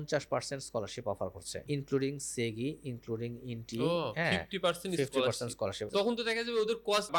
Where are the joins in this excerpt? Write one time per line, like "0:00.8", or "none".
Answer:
none